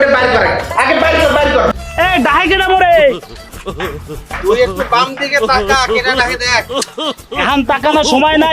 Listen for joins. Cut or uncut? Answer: cut